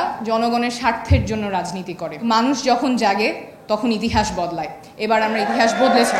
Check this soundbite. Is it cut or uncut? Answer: cut